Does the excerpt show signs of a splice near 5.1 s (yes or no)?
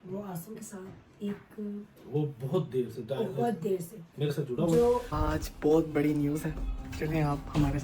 yes